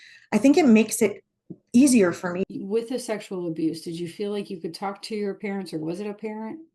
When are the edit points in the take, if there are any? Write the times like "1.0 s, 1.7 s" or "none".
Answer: 2.4 s